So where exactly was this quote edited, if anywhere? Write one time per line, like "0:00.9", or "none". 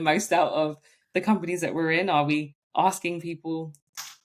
0:02.6